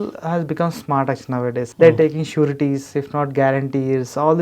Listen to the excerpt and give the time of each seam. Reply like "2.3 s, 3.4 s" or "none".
1.7 s